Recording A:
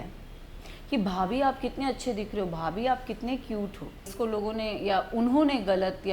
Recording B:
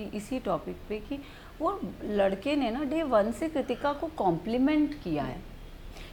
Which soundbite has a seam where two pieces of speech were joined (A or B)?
A